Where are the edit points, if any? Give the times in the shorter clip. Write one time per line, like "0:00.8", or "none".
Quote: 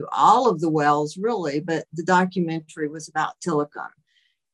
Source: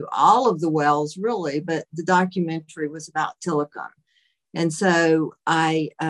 none